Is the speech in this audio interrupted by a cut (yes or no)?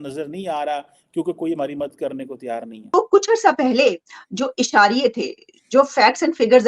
yes